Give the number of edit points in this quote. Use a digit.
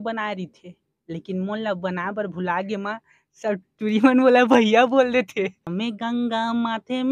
1